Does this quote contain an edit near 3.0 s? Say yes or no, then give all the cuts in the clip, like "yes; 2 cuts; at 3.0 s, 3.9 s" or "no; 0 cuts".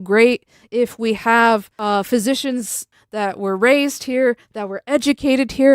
yes; 2 cuts; at 1.7 s, 3.0 s